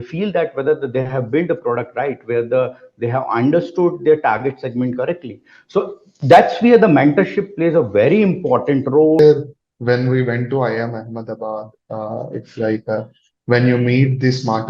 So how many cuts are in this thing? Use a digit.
1